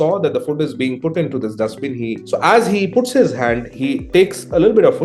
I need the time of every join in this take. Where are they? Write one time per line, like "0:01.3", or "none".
0:02.2
0:03.7